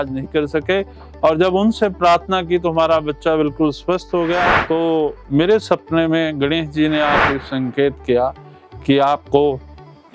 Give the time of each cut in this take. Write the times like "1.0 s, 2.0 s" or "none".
4.6 s